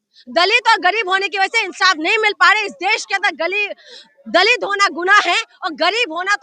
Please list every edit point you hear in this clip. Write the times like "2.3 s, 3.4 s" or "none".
none